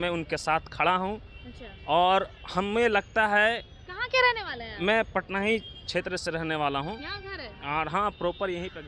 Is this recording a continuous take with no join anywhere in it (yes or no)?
yes